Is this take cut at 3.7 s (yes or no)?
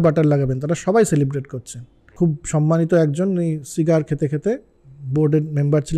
no